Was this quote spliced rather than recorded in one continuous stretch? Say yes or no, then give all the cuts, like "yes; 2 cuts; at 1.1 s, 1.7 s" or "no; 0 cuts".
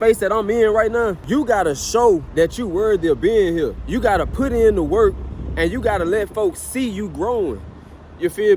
yes; 3 cuts; at 1.2 s, 2.3 s, 3.8 s